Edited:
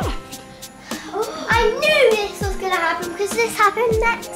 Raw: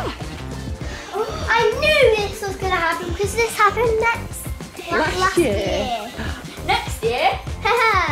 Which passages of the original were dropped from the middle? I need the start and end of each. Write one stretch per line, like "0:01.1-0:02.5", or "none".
none

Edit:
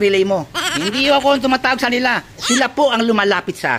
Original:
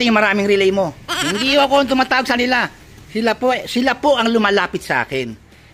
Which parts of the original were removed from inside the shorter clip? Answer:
0:02.9-0:03.7

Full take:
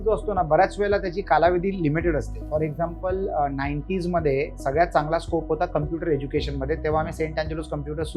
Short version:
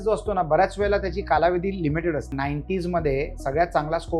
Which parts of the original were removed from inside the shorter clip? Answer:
0:02.3-0:03.5

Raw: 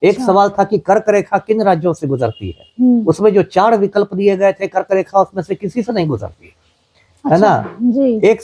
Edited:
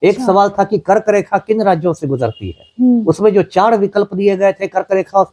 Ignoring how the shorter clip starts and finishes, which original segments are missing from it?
none

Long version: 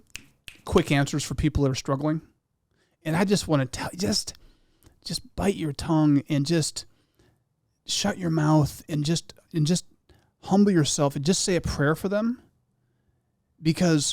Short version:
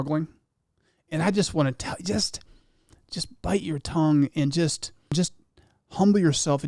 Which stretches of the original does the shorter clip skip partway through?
0:07.1-0:09.6

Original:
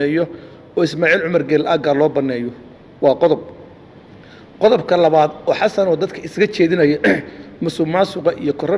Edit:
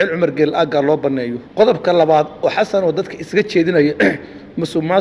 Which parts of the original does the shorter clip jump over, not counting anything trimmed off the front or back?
0:02.5-0:04.4

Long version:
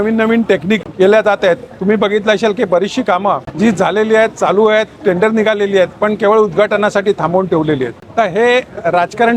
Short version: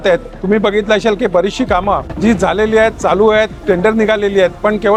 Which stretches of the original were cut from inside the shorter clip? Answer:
none

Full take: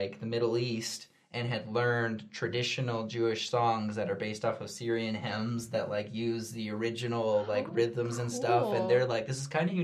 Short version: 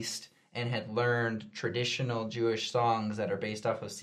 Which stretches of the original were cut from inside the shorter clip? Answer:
none

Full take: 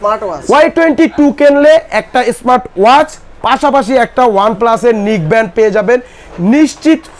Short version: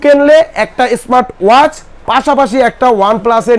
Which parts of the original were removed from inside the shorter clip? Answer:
none

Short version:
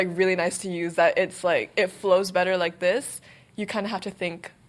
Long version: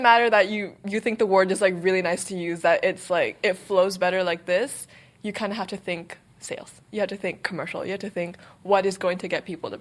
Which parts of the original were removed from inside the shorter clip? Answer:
none

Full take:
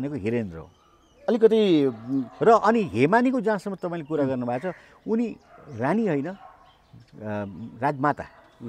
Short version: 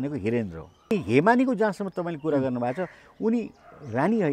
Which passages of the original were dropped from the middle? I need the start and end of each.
0:01.0-0:02.8

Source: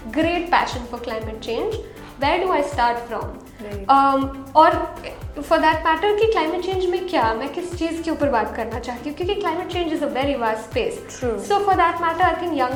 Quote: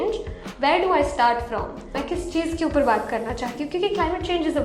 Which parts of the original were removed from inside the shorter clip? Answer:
0:03.6-0:07.4

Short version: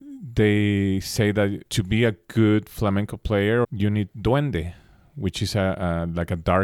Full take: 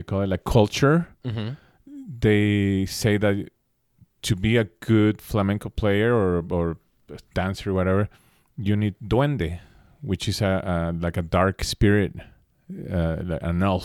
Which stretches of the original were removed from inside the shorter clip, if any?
0:03.5-0:04.2
0:06.2-0:08.5

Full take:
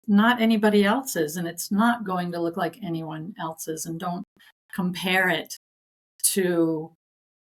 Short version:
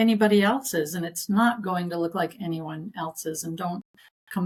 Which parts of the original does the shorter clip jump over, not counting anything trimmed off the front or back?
none

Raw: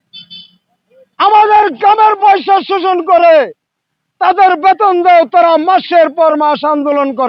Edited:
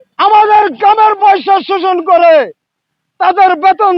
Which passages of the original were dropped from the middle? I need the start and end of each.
none

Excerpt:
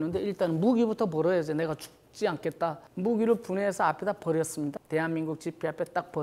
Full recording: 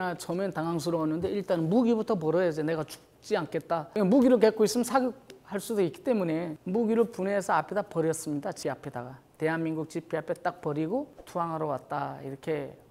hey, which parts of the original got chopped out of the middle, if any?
0:03.9-0:06.5
0:08.5-0:09.3

